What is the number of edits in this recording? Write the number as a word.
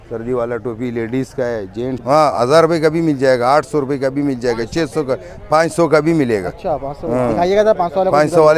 one